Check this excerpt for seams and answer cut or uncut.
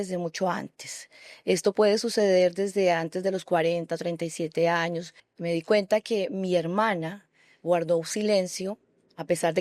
cut